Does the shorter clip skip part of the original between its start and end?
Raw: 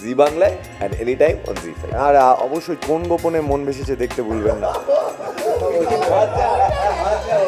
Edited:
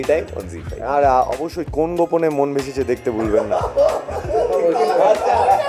no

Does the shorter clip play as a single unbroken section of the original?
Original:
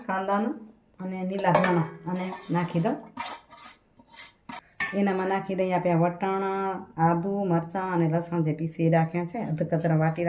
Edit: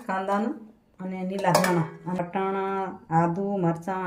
no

